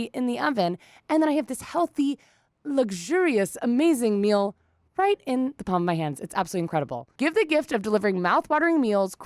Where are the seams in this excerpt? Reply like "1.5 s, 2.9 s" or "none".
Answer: 7.0 s